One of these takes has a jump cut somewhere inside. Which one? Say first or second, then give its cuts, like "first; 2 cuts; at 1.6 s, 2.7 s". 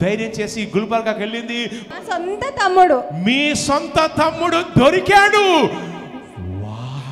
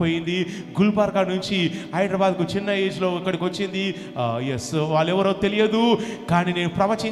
first; 1 cut; at 1.8 s